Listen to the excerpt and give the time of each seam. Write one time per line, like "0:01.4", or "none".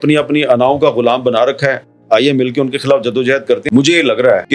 0:03.6